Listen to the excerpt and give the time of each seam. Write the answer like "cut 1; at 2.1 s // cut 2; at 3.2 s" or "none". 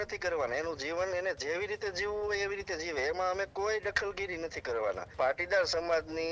cut 1; at 5.1 s